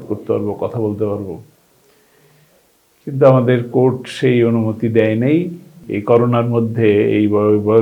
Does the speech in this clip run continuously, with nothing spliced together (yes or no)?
no